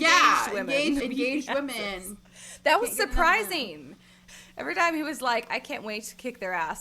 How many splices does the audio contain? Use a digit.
2